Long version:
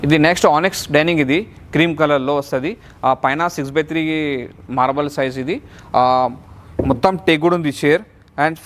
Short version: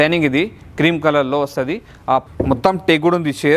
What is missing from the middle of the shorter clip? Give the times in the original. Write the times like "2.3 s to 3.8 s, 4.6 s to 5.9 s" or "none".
3.2 s to 6.6 s

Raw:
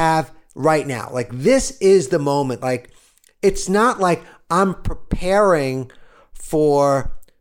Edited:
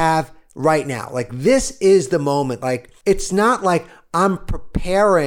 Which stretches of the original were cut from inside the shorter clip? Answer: 2.9 s to 3.3 s

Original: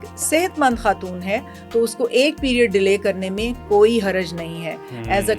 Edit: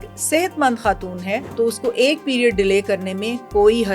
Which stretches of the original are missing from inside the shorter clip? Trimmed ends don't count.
1.5 s to 1.6 s

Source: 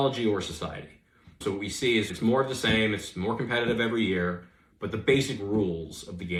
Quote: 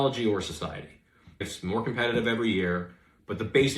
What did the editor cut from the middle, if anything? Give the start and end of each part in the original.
1.4 s to 2.9 s

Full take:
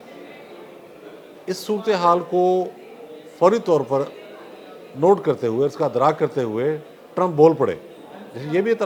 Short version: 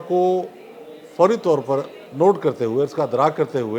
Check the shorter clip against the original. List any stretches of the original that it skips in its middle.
4.2 s to 4.8 s

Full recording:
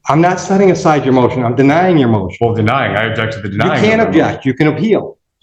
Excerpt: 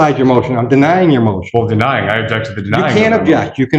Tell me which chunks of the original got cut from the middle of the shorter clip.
none

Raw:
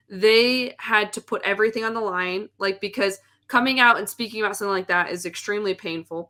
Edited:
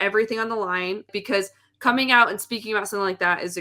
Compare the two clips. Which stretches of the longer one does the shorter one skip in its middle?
2.5 s to 2.8 s

